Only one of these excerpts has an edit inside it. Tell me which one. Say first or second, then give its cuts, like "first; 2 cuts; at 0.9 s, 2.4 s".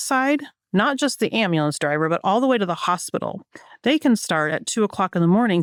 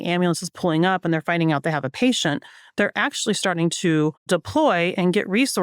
second; 1 cut; at 4.3 s